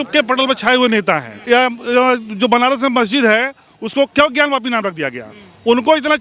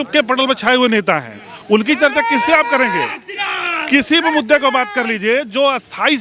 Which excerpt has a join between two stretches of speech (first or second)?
first